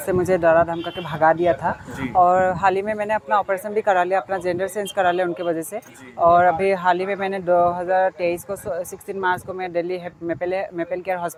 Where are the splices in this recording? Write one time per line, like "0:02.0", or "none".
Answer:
none